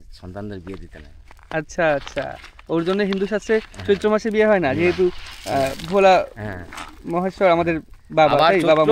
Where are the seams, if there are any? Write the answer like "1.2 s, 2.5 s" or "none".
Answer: none